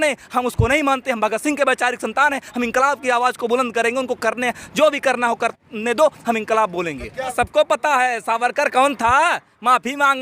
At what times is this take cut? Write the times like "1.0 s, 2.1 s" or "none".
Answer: 7.3 s